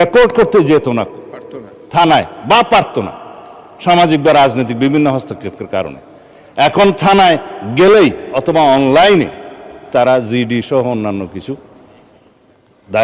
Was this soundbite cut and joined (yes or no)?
no